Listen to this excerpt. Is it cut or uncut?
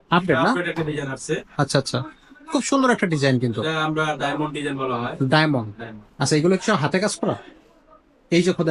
uncut